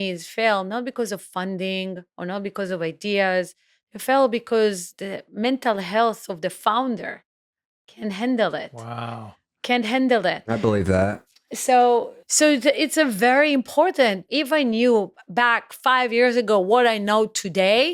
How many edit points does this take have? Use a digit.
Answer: 3